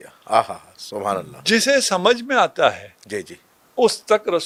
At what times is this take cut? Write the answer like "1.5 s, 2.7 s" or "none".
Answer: none

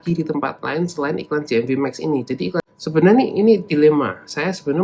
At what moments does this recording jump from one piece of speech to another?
2.7 s

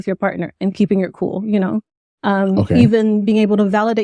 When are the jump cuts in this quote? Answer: none

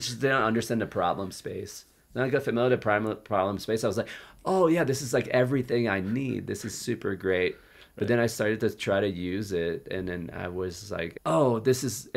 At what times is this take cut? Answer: 11.1 s

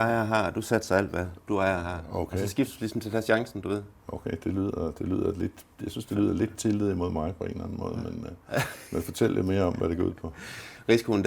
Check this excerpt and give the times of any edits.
none

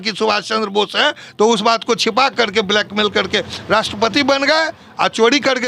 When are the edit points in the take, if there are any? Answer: none

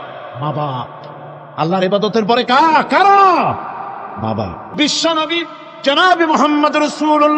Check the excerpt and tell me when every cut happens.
4.6 s

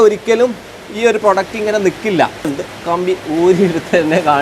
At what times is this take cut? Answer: 2.5 s

